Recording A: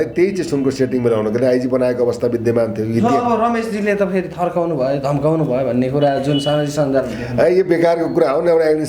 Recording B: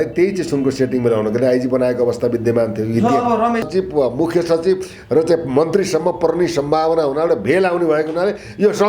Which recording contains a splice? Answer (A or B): B